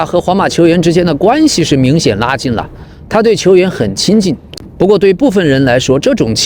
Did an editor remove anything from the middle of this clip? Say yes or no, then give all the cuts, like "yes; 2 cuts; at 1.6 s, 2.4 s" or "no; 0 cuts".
no; 0 cuts